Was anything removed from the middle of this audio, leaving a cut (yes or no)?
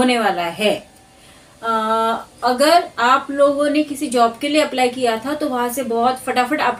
no